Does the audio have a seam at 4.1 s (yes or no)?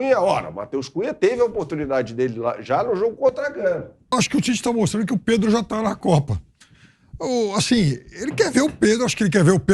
yes